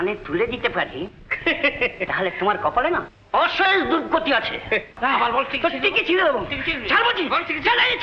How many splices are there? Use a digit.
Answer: 1